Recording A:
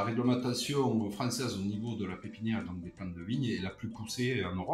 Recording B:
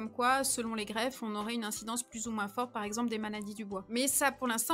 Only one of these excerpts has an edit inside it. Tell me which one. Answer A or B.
B